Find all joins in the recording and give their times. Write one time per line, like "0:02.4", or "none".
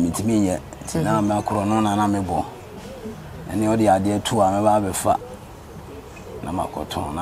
none